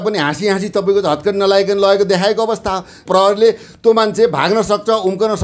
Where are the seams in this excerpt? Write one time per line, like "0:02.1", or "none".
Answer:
0:03.0